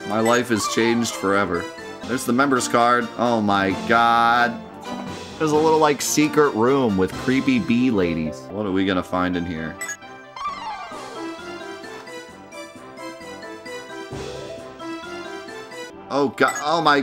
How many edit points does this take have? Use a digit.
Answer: 3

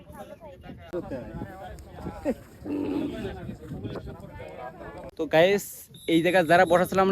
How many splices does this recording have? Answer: 2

